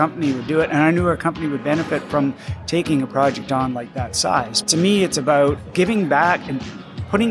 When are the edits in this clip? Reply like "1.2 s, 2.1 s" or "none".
4.5 s, 5.6 s